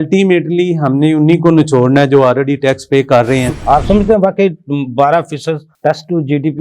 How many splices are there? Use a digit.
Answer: 1